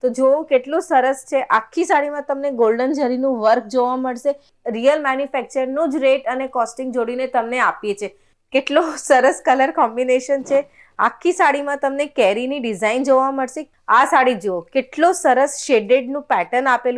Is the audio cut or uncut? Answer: cut